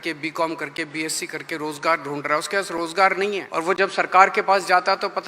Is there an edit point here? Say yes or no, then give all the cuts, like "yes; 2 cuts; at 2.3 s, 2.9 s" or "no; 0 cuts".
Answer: yes; 1 cut; at 3.4 s